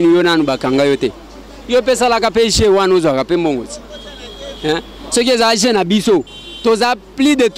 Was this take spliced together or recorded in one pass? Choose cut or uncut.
uncut